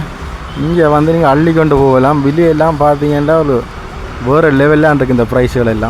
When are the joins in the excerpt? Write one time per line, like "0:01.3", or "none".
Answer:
none